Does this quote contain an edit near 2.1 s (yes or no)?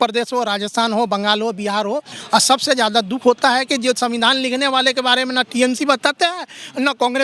yes